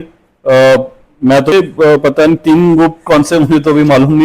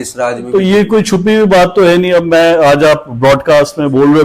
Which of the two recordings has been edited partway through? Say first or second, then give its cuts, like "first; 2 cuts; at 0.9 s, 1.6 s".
first; 1 cut; at 1.5 s